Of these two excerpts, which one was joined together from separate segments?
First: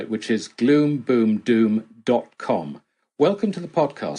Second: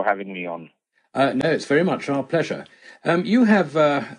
second; 1 cut; at 1.3 s

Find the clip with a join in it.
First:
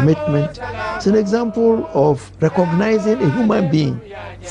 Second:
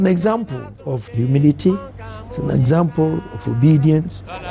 second; 1 cut; at 1.1 s

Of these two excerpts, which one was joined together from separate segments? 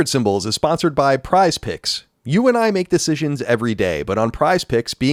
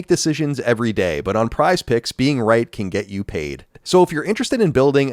second; 1 cut; at 3.8 s

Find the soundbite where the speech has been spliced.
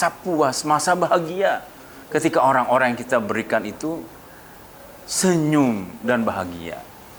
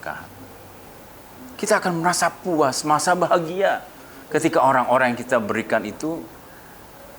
second; 1 cut; at 1.0 s

